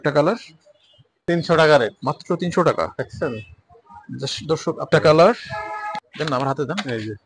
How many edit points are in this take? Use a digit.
3